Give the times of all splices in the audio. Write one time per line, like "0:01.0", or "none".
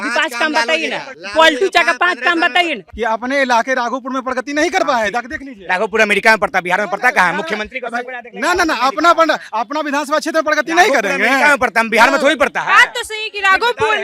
0:01.2
0:02.8